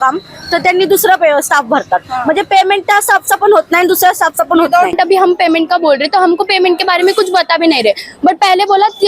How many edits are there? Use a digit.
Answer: 1